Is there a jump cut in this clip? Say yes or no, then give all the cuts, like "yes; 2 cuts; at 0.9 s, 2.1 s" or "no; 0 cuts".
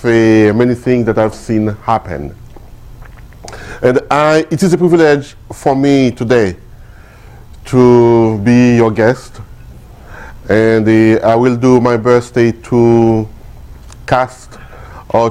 no; 0 cuts